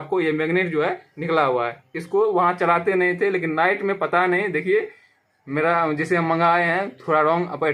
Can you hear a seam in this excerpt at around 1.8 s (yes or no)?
no